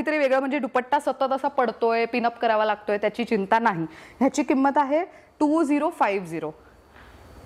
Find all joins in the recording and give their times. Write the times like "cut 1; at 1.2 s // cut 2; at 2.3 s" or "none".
none